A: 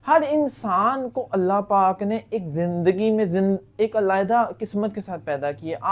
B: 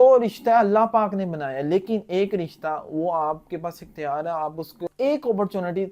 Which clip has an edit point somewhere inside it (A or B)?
B